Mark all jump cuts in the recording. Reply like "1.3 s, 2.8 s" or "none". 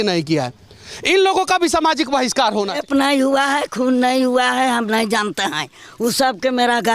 2.8 s

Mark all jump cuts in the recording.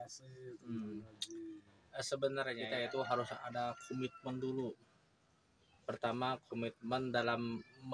2.6 s

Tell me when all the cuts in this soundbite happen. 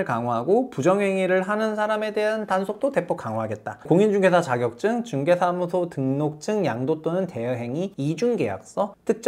3.9 s, 7.9 s

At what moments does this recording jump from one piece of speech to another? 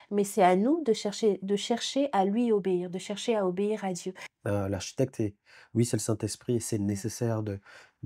4.2 s

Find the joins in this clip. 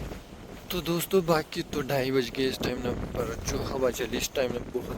none

